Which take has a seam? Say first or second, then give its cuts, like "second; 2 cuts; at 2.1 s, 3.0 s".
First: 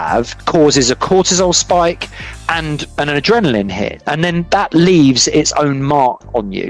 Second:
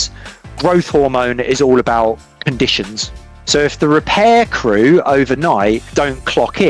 second; 1 cut; at 3.4 s